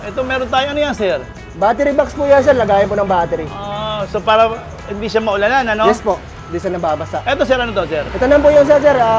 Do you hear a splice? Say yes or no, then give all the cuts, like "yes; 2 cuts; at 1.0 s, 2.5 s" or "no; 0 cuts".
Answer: yes; 1 cut; at 8.1 s